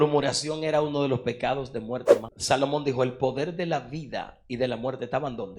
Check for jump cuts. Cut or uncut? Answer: cut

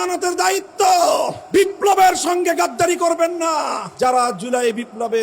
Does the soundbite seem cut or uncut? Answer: cut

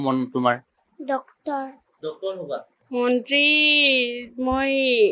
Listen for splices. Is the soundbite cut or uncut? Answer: cut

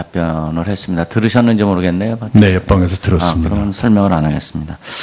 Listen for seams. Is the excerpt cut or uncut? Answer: uncut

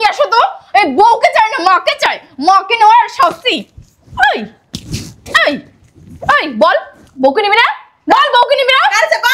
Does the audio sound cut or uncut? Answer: uncut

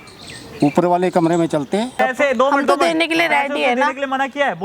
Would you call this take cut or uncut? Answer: cut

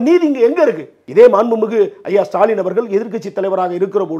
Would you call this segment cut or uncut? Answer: cut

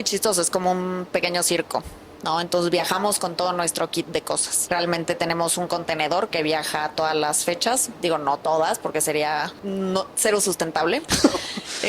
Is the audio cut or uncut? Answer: cut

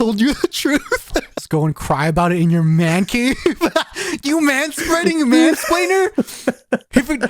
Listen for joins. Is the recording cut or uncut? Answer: cut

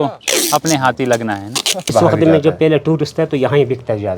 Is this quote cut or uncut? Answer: cut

